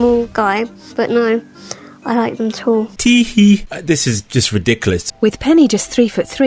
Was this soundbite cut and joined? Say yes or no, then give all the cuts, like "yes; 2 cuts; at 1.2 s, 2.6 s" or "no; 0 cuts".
yes; 3 cuts; at 2.9 s, 3.7 s, 5.1 s